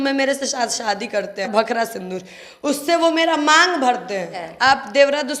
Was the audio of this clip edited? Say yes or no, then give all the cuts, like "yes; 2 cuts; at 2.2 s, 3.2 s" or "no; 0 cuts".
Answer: yes; 2 cuts; at 1.5 s, 4.5 s